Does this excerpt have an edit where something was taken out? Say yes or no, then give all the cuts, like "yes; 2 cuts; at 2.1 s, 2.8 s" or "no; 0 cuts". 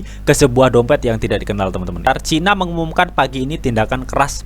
yes; 1 cut; at 2.1 s